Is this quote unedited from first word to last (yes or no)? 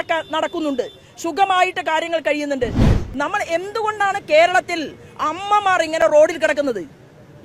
no